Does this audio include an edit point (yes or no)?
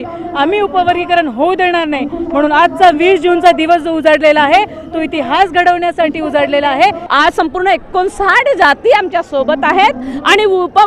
yes